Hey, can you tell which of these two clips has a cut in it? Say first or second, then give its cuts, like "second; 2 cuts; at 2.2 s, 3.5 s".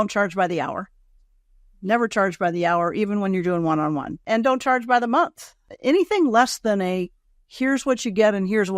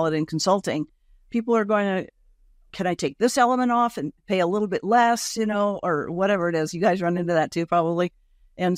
first; 2 cuts; at 4.1 s, 5.7 s